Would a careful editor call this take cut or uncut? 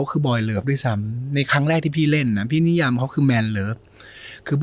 uncut